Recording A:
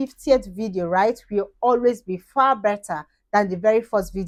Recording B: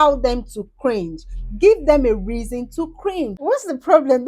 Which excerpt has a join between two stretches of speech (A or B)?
B